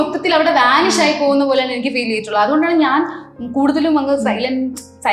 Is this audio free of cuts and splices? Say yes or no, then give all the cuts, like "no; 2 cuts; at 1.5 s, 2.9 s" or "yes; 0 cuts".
yes; 0 cuts